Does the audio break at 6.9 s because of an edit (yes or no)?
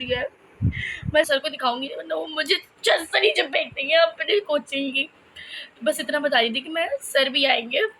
no